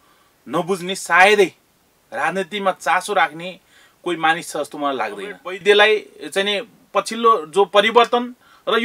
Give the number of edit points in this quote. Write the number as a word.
one